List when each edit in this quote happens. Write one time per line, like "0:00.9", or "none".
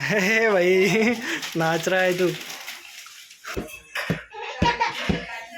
0:03.4